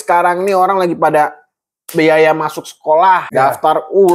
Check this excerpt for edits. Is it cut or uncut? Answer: cut